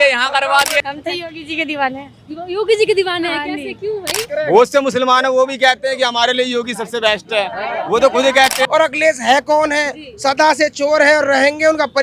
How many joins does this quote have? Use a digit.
3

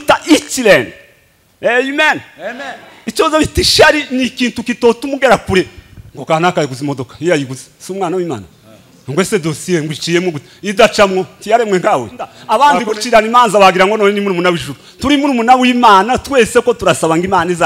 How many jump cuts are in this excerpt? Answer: 1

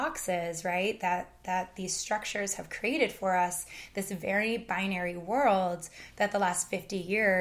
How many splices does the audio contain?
0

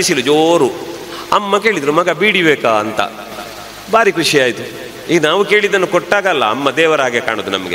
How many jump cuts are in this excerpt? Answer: 0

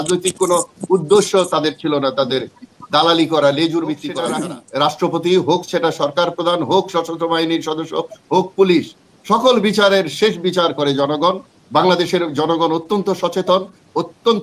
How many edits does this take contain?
1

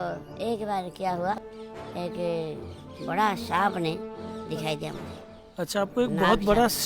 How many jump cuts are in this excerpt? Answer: 1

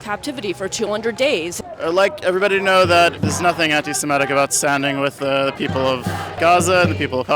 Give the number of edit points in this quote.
3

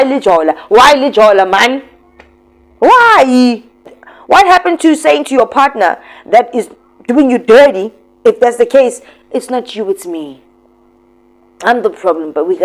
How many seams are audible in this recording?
1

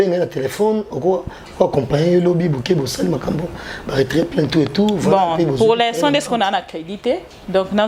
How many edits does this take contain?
0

